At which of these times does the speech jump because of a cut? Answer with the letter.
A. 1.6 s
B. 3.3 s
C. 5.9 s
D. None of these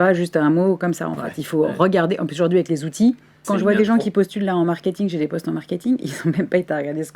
B